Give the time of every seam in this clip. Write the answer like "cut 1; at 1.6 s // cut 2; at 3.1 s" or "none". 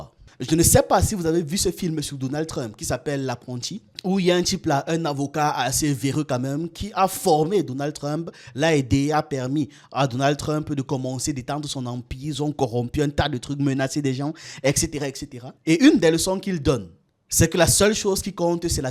none